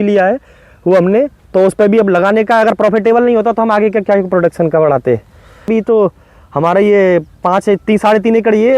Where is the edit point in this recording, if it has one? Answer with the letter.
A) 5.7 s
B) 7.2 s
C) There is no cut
A